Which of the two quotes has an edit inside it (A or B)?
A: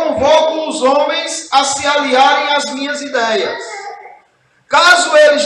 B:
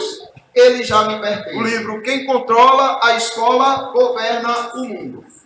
B